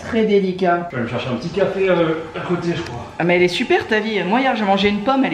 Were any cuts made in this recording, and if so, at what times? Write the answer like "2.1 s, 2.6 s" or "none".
0.9 s